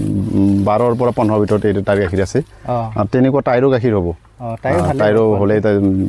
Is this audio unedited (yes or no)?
yes